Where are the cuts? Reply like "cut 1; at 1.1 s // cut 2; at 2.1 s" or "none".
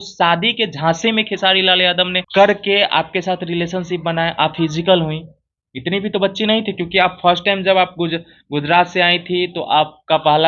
none